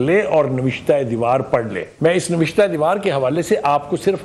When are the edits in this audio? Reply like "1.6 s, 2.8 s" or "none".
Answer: 1.8 s